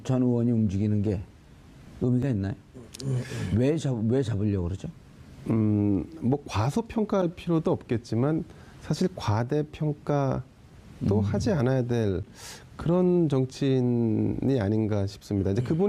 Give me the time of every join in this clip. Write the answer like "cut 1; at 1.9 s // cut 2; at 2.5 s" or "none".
none